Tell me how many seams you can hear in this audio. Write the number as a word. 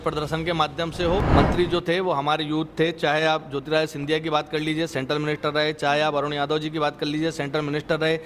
one